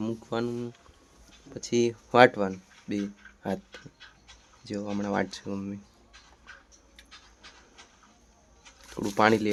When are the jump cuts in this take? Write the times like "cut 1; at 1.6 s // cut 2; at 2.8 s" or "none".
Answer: none